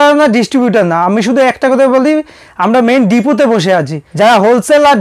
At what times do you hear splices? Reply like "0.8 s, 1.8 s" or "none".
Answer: 4.0 s

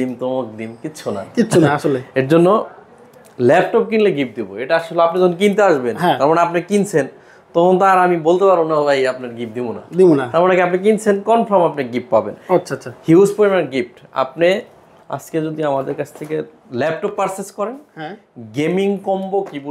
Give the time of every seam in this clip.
none

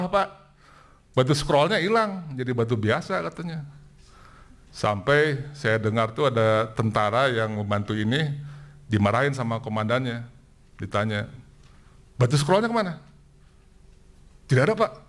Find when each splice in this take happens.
none

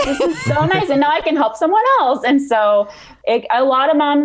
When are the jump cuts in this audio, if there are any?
3.0 s

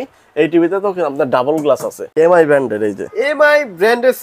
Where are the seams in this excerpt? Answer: 2.0 s

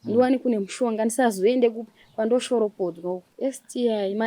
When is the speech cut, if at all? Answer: 3.3 s

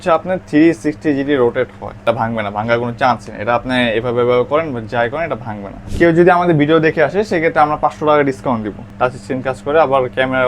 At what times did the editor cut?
2.0 s, 5.8 s, 8.8 s

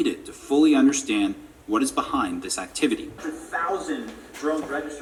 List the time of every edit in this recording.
none

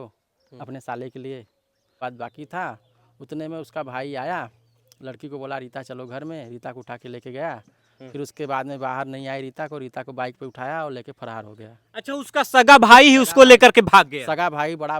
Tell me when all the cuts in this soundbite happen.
2.0 s

